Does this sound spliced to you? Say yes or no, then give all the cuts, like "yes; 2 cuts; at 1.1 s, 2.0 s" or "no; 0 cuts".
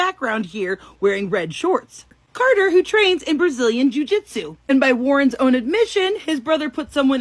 yes; 1 cut; at 2.1 s